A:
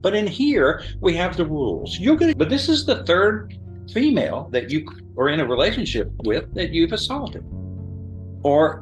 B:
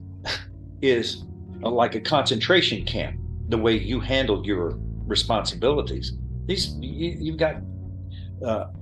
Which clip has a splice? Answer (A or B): A